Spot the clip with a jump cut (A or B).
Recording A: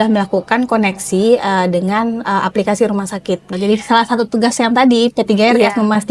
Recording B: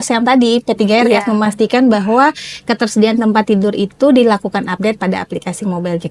A